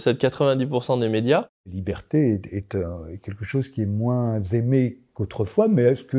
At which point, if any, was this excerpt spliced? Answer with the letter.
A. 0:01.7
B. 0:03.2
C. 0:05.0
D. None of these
A